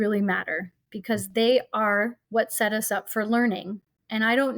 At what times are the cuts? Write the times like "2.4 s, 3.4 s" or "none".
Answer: 2.2 s